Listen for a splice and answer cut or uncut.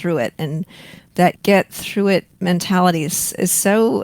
cut